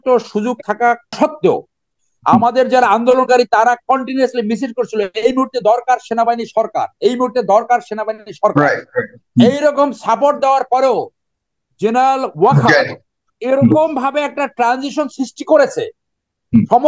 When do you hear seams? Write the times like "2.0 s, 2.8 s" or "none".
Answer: 1.1 s